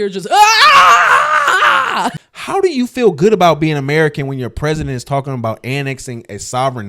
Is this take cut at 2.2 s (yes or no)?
yes